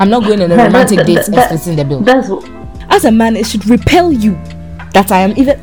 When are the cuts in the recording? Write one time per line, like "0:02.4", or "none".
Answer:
0:02.7